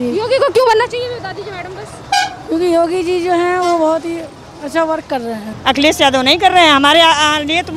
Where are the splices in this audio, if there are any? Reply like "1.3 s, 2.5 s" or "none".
5.5 s